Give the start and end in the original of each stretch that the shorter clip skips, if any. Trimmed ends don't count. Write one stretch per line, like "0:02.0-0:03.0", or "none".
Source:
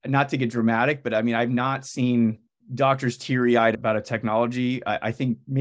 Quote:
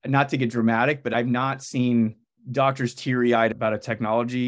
0:01.1-0:01.3